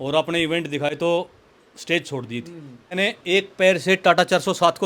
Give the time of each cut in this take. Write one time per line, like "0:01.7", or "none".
0:01.0
0:02.9